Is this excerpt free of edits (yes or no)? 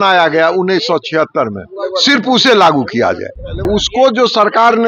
no